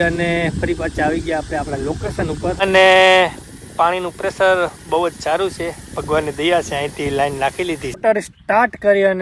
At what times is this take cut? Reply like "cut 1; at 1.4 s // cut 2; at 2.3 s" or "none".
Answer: cut 1; at 2.6 s // cut 2; at 7.9 s